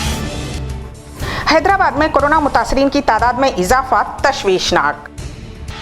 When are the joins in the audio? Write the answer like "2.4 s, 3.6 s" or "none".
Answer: 0.9 s